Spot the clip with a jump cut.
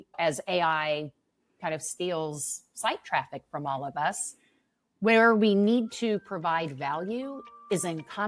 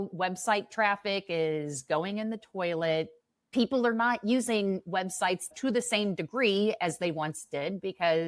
second; 1 cut; at 5.5 s

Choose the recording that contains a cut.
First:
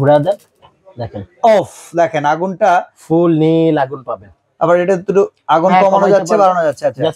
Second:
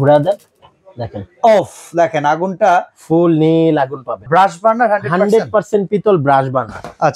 second; 1 cut; at 4.3 s

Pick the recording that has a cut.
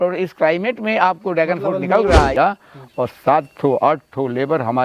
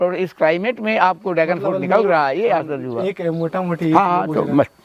first; 1 cut; at 2.3 s

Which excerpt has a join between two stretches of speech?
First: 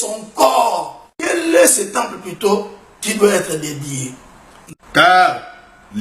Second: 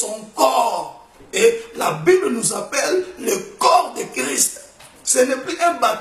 first; 2 cuts; at 1.3 s, 4.6 s

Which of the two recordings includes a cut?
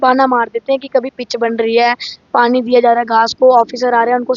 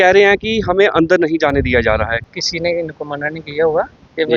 second; 1 cut; at 2.3 s

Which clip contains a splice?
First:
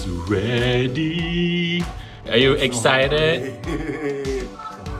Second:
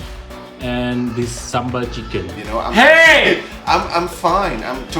second; 1 cut; at 2.4 s

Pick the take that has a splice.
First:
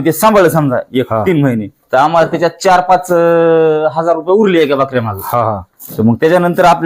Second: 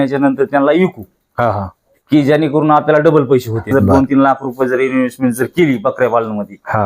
second; 1 cut; at 3.6 s

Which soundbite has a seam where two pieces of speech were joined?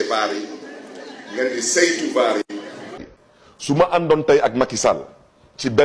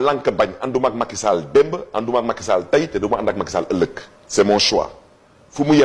first; 1 cut; at 2.9 s

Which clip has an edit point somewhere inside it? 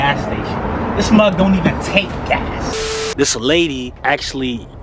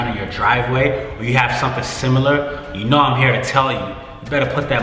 first; 2 cuts; at 2.7 s, 3.9 s

